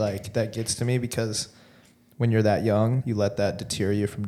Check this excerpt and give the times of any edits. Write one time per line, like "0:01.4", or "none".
0:03.0

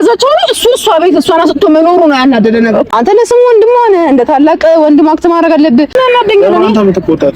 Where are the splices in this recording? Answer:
0:02.9
0:05.9

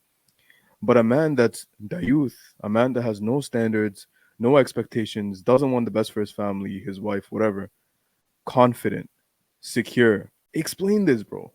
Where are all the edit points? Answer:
0:10.4

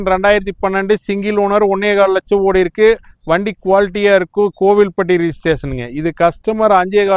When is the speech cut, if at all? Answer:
none

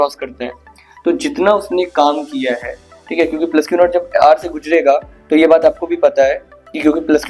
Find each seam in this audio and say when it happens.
none

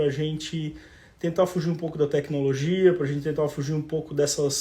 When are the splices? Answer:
none

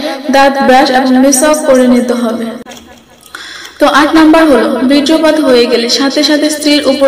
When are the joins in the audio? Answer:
0:02.5

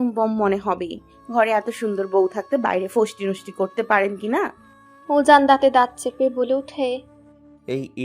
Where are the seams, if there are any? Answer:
none

